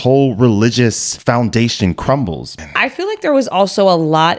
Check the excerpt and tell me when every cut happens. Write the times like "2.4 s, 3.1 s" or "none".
1.1 s, 2.6 s